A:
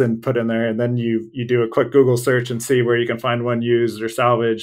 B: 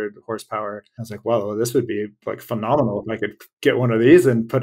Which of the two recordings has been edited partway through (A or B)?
B